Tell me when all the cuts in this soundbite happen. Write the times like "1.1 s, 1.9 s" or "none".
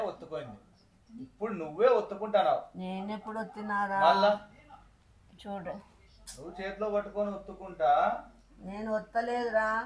none